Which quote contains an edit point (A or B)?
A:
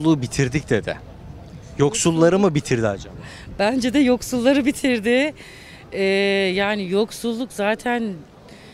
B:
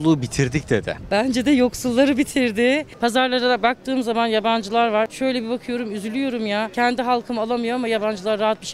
B